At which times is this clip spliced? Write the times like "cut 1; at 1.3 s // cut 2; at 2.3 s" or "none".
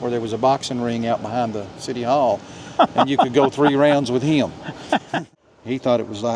cut 1; at 5.2 s